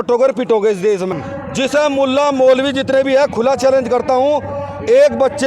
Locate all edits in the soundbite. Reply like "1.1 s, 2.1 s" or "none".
1.2 s